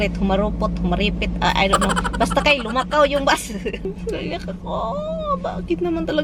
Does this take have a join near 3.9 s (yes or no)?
yes